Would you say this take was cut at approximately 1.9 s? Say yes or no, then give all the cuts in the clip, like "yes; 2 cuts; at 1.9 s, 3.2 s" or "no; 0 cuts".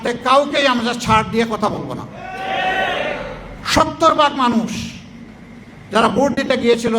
no; 1 cut; at 3.5 s